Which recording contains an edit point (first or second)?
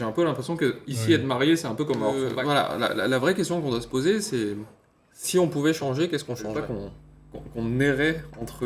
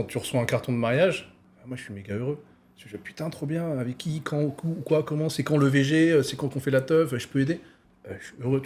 first